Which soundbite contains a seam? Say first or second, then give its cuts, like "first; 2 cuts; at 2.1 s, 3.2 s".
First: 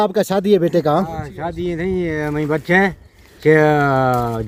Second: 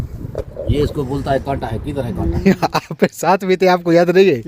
second; 1 cut; at 2.4 s